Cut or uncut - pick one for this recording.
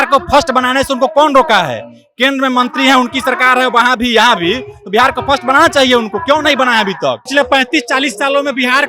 cut